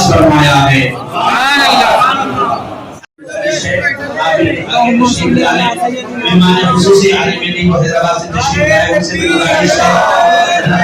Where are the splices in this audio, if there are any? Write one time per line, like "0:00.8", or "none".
0:02.8